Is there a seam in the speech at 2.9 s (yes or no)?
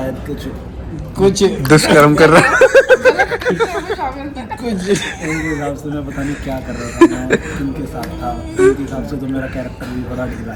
no